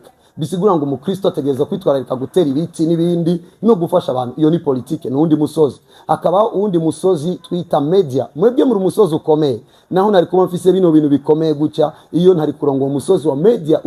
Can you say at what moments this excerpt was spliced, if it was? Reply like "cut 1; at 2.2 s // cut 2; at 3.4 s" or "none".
none